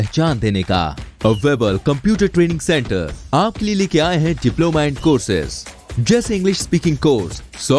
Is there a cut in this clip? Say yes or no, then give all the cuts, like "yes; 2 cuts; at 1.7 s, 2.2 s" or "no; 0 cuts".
no; 0 cuts